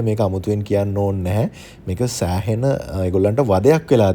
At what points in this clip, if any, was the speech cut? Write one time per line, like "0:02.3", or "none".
none